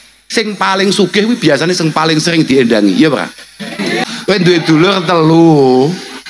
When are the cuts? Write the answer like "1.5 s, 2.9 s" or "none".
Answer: 4.0 s